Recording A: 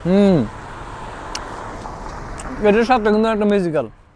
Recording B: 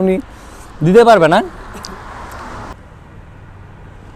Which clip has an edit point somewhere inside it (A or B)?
B